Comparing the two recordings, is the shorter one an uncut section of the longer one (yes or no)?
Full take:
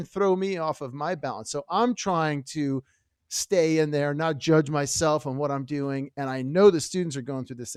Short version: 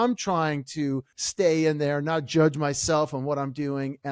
no